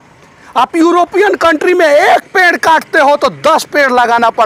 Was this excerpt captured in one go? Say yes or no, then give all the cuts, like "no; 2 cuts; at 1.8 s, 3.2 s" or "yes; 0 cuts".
yes; 0 cuts